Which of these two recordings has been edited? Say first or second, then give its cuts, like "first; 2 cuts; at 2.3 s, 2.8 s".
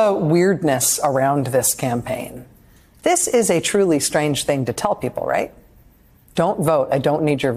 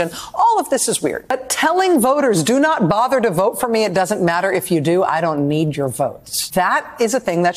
second; 1 cut; at 1.2 s